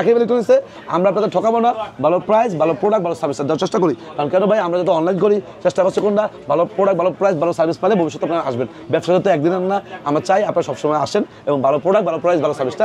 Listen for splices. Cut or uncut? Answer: uncut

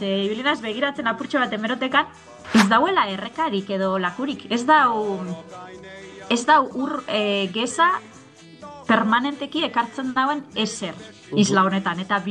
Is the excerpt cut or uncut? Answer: cut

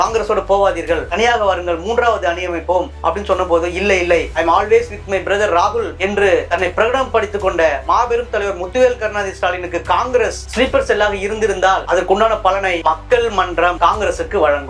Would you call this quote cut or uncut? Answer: uncut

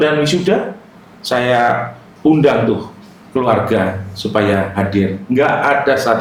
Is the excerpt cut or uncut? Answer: uncut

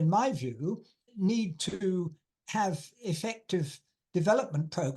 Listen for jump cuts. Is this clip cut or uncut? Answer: cut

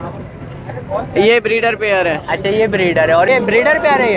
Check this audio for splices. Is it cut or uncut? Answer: cut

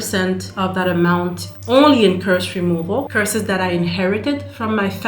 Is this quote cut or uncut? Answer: cut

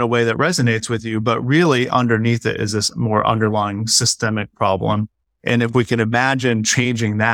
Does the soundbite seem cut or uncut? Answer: uncut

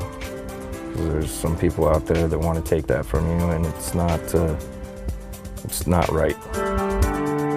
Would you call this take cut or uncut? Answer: cut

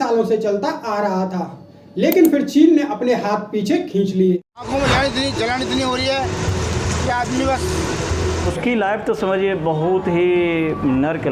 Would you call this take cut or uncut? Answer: cut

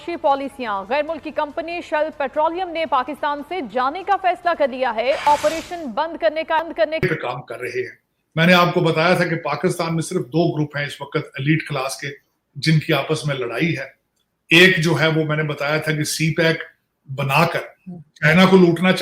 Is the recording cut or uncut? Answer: cut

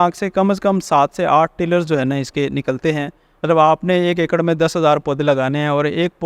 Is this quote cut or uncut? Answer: uncut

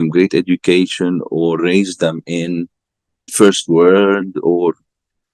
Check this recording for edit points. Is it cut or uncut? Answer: cut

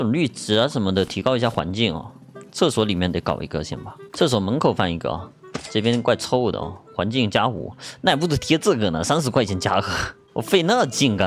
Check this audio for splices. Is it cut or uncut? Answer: uncut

